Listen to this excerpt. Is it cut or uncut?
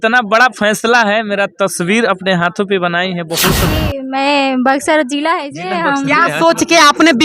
cut